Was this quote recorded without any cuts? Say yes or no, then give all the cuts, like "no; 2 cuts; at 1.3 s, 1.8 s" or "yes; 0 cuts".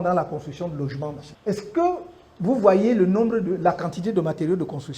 no; 1 cut; at 1.3 s